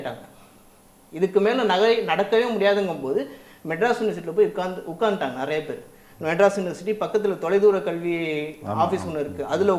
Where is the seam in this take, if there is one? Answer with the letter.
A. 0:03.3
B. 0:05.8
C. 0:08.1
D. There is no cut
D